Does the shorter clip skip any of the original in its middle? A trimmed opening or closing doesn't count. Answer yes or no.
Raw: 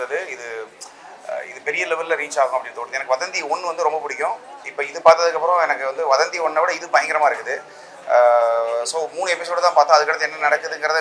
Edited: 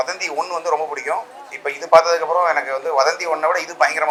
no